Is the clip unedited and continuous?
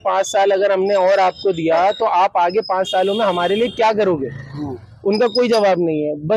yes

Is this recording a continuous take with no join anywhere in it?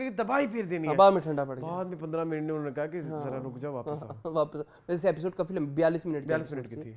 yes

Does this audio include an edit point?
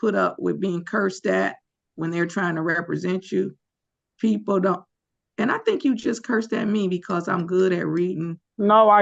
no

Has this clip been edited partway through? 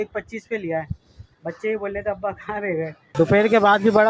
yes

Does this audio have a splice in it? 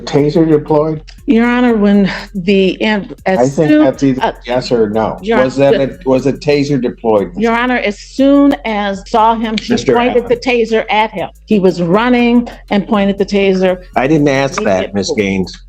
yes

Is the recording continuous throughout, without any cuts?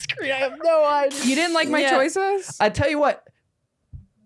no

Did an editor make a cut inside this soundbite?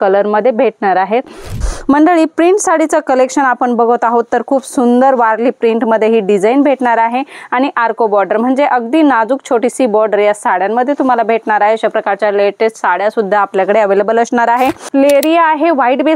yes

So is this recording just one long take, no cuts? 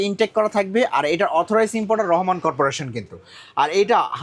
yes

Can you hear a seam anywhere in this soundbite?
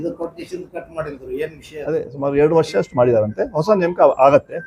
yes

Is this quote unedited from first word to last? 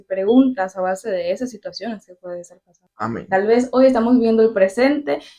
no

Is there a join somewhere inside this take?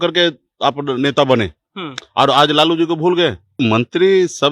yes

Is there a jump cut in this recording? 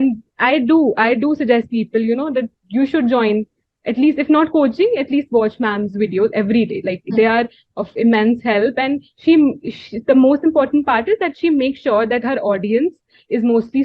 no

